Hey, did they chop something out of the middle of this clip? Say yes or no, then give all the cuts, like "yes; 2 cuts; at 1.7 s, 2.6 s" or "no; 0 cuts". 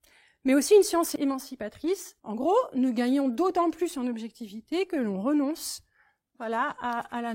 yes; 2 cuts; at 1.1 s, 2.1 s